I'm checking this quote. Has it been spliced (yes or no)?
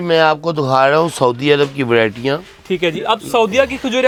no